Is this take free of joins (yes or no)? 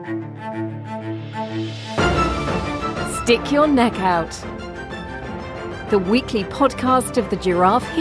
yes